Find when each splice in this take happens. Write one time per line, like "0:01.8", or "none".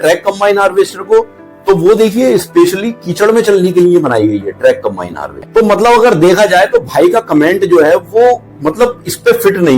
0:05.4